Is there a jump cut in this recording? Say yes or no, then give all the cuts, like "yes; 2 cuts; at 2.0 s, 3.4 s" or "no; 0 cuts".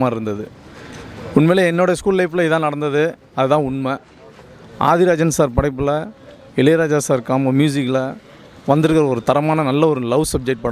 no; 0 cuts